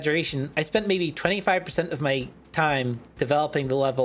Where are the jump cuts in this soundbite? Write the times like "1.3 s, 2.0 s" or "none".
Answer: none